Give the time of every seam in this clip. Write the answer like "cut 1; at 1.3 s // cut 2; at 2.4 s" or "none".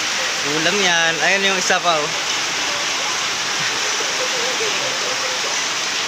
none